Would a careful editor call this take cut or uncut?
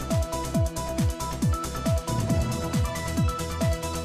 uncut